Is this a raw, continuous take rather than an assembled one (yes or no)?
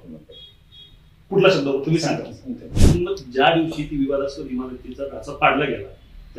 no